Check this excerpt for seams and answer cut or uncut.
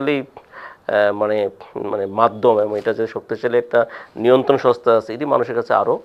uncut